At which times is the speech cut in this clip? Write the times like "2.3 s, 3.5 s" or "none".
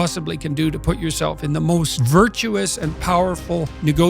2.0 s